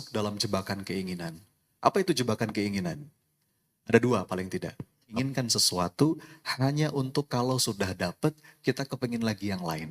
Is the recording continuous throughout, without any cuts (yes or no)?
no